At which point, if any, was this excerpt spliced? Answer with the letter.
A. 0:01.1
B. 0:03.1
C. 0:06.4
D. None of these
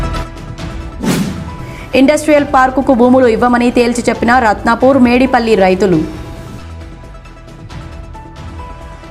D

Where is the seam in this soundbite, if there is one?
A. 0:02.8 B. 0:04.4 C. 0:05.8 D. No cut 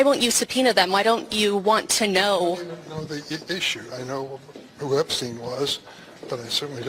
C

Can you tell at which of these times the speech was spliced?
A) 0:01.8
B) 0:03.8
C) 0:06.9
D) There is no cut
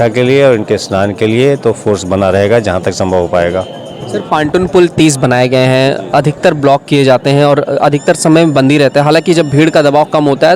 D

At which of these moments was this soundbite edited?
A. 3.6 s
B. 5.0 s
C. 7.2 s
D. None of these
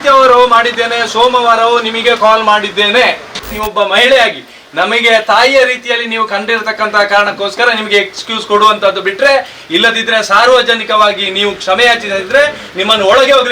A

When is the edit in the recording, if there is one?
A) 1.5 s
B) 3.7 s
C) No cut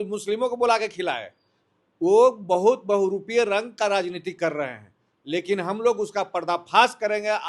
C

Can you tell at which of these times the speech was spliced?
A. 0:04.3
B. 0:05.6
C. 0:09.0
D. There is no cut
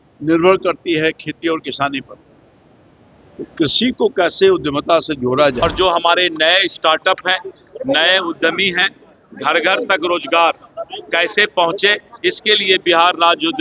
B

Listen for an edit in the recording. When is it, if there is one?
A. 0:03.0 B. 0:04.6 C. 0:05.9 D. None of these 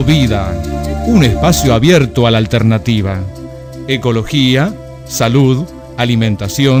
D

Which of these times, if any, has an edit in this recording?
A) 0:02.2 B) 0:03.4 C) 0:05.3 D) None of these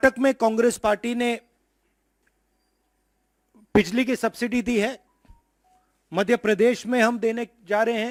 D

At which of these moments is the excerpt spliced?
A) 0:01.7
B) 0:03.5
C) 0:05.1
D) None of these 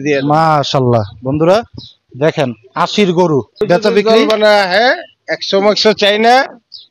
B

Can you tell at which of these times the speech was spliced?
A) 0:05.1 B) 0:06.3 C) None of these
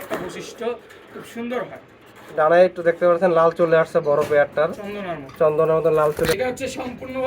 B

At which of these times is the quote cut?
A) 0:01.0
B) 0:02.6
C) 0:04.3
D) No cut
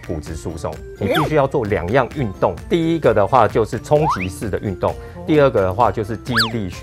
B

